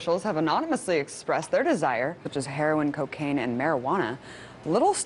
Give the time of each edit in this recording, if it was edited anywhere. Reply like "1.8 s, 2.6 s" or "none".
none